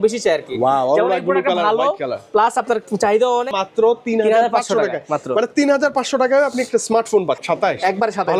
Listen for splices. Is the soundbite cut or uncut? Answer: cut